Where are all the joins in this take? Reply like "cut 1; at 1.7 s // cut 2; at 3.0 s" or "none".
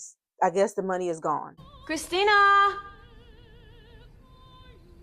cut 1; at 1.6 s